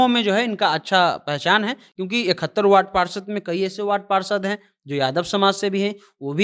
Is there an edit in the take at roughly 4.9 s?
no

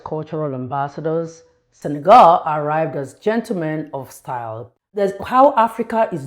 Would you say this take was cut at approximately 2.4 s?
no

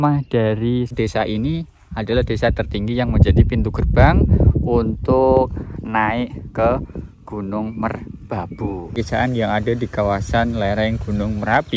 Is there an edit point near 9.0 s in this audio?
yes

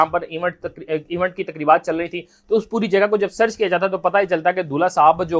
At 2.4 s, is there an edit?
no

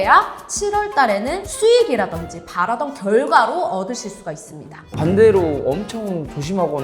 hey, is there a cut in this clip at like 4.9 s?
yes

